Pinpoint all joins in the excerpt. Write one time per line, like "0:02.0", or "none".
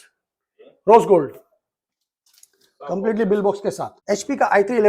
0:03.9